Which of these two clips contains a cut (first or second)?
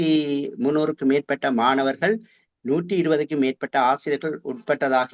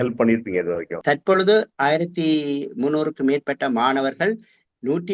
second